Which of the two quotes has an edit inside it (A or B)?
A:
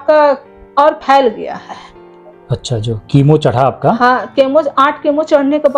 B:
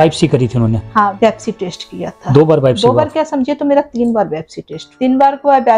B